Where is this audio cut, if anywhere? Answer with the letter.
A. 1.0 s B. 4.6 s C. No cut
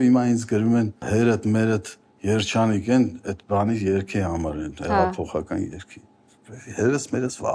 A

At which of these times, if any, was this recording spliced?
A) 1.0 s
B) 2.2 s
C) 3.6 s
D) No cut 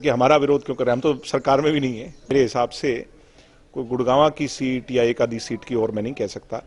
B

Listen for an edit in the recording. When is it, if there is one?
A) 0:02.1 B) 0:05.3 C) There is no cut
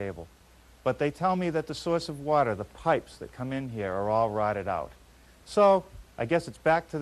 C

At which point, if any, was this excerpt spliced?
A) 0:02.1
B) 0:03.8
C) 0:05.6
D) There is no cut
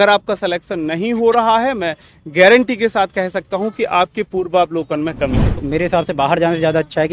C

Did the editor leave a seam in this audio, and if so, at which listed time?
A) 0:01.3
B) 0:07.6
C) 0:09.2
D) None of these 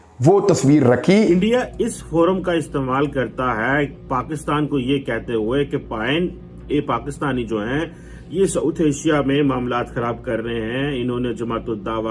A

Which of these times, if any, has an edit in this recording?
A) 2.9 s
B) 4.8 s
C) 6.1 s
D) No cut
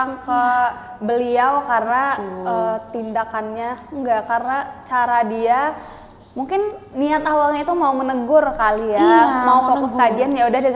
D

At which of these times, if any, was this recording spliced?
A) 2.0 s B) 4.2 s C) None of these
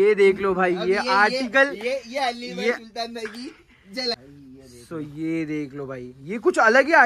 B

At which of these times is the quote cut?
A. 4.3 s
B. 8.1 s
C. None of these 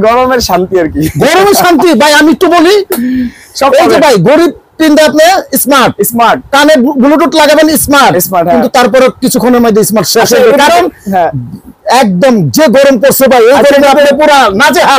C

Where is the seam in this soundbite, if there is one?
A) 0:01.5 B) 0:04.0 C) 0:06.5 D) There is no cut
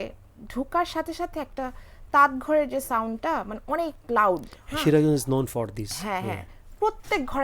D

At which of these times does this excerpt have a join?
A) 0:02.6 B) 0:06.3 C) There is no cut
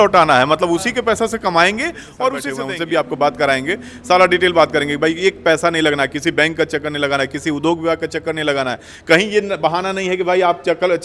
A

